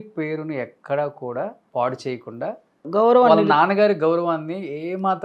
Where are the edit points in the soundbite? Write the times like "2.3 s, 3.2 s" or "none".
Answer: 1.6 s, 2.8 s